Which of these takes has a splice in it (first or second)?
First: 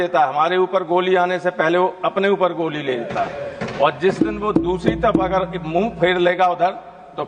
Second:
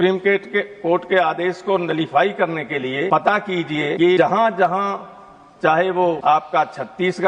second